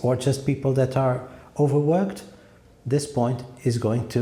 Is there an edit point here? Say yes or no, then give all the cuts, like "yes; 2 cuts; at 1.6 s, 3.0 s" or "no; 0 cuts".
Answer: no; 0 cuts